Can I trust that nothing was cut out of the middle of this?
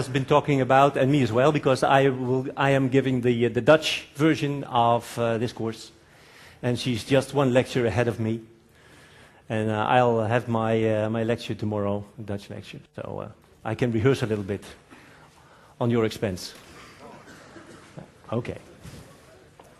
yes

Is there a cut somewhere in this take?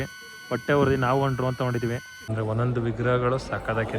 yes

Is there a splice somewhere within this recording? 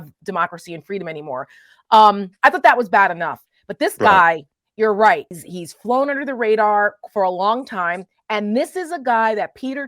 yes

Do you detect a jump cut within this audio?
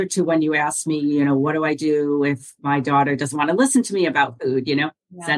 no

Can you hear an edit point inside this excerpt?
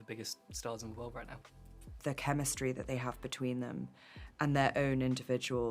yes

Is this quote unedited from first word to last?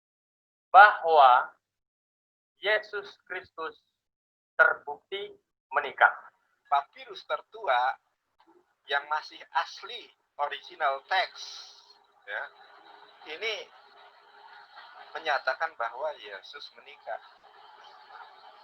no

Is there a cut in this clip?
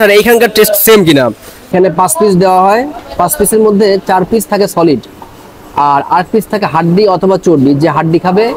yes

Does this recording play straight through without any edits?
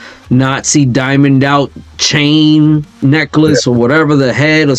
yes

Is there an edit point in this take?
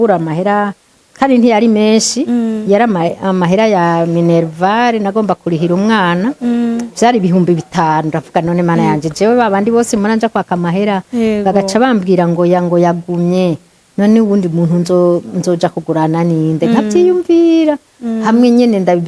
no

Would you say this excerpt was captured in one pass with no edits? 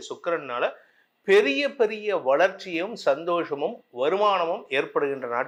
yes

